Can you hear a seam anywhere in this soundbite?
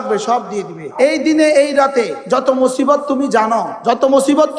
yes; 3 cuts; at 0.8 s, 2.2 s, 3.7 s

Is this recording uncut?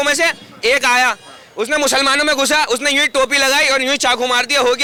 yes; 0 cuts

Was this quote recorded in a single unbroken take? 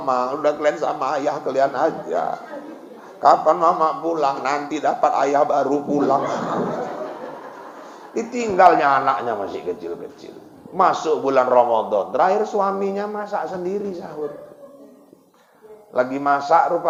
yes; 0 cuts

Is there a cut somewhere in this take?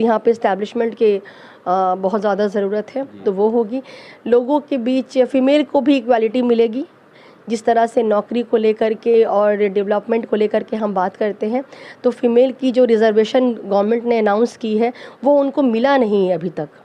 no; 0 cuts

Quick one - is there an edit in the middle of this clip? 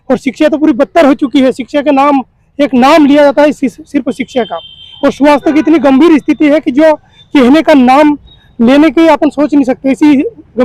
no; 0 cuts

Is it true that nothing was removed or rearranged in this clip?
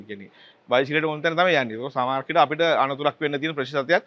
yes; 0 cuts

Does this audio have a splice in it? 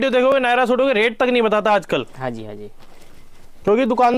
no; 0 cuts

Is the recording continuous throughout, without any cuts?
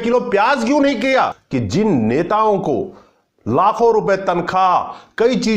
no; 1 cut; at 1.4 s

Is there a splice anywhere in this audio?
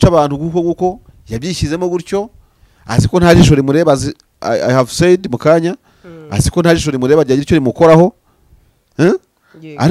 no; 0 cuts

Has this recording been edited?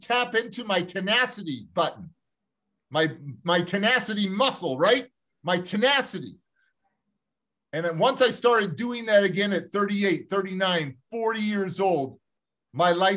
no; 0 cuts

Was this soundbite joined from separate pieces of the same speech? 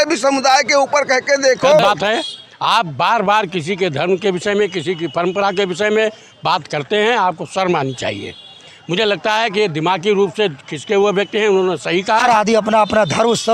yes; 2 cuts; at 1.8 s, 12.2 s

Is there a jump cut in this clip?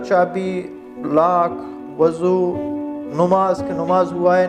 no; 0 cuts

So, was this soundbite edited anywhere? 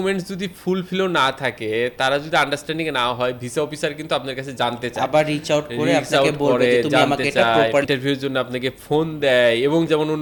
no; 0 cuts

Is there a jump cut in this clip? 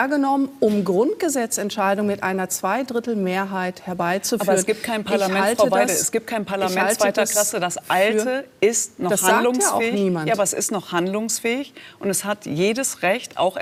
no; 0 cuts

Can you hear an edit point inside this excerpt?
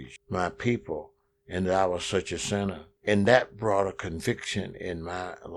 yes; 1 cut; at 2.9 s

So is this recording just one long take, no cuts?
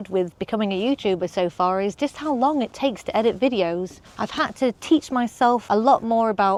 yes; 0 cuts

